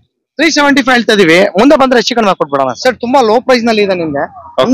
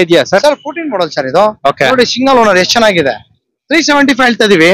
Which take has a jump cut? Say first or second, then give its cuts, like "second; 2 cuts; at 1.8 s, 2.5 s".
first; 1 cut; at 2.7 s